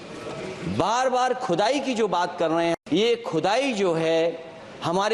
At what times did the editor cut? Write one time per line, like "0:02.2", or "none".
0:02.8